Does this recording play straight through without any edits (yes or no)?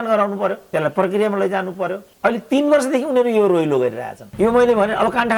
no